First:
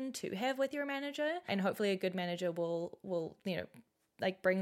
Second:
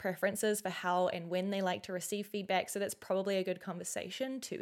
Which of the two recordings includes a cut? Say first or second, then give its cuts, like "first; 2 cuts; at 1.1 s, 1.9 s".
first; 1 cut; at 1.5 s